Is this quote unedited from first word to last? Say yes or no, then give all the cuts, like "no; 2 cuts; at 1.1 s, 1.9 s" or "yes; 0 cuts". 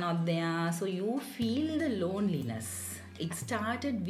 yes; 0 cuts